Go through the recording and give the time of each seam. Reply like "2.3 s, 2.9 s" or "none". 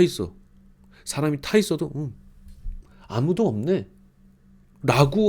none